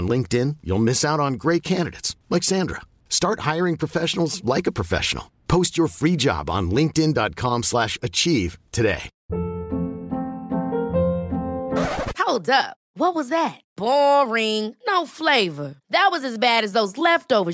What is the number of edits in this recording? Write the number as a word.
one